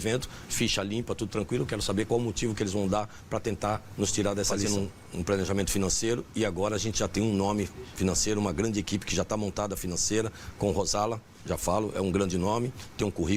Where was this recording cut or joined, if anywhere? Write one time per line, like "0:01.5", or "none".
0:04.6